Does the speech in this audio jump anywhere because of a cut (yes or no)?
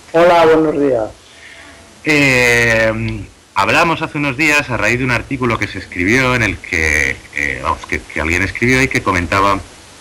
no